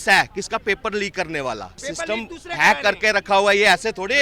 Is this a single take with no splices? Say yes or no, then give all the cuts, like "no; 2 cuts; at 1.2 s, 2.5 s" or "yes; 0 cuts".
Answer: no; 1 cut; at 1.8 s